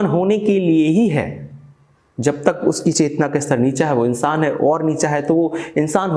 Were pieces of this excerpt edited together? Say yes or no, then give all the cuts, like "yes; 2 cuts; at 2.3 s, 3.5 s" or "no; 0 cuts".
no; 0 cuts